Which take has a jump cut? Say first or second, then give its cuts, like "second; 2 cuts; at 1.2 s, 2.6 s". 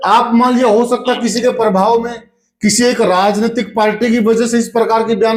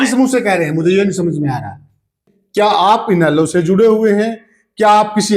second; 1 cut; at 2.5 s